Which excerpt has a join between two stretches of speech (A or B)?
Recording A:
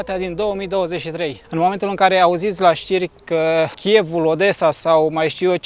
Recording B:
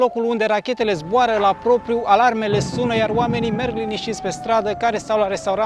A